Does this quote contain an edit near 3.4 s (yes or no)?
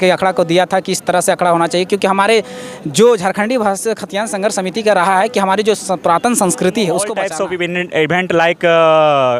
no